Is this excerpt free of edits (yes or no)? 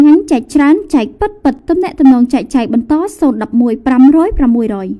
yes